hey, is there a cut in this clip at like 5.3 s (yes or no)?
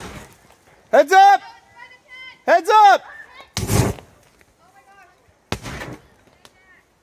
yes